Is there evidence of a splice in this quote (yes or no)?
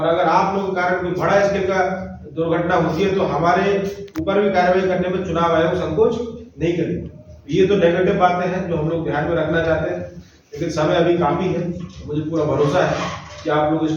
no